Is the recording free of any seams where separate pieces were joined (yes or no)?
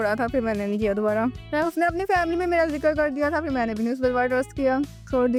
yes